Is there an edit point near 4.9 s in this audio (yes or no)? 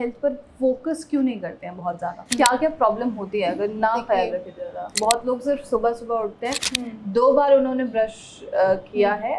yes